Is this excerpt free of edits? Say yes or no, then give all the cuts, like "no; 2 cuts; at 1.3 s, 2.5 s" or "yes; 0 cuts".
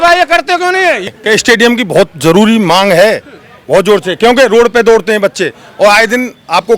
no; 1 cut; at 1.1 s